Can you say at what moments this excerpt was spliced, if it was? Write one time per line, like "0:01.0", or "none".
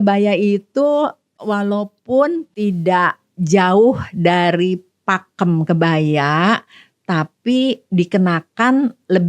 0:01.4
0:02.5